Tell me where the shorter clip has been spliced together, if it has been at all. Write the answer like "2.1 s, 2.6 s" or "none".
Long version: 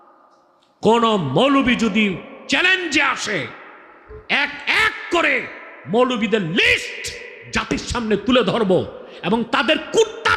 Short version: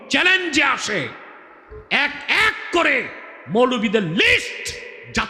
none